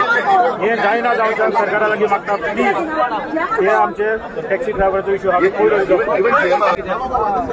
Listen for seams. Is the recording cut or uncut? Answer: uncut